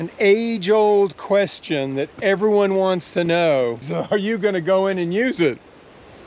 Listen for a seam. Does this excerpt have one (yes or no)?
yes